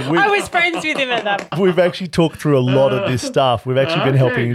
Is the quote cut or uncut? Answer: cut